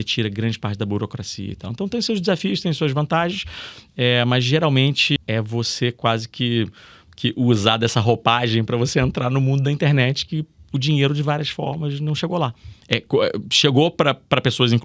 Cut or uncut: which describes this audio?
cut